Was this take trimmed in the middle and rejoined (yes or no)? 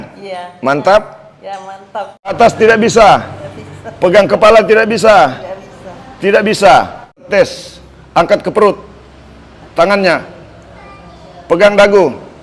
yes